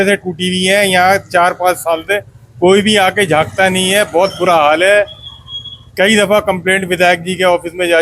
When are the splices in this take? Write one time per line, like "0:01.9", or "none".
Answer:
none